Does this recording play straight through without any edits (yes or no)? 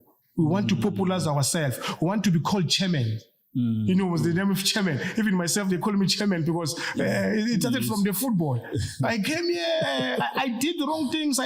yes